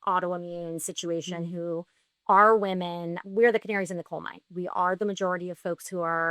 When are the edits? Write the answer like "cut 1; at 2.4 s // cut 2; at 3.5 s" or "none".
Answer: cut 1; at 3.2 s // cut 2; at 4.5 s